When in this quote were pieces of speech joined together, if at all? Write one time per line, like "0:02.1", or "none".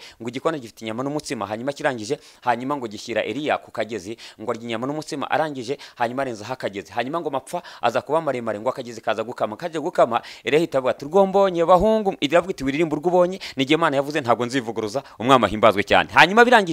none